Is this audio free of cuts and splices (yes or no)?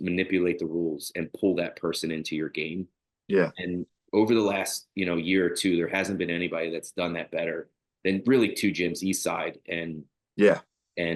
yes